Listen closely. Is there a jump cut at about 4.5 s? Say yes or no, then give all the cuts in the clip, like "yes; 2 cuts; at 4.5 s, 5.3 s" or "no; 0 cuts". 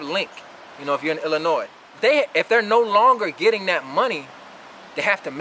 no; 1 cut; at 1.8 s